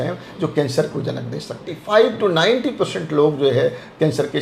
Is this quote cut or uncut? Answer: cut